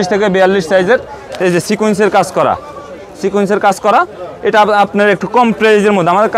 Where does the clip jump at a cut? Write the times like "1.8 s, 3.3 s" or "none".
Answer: none